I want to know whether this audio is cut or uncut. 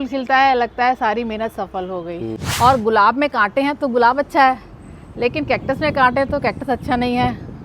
cut